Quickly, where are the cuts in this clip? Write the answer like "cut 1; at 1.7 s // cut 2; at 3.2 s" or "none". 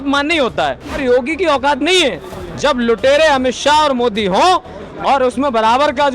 cut 1; at 0.9 s